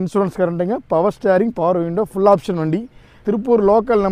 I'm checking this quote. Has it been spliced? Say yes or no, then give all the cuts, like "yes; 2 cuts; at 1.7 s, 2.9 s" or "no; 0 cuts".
yes; 1 cut; at 3.1 s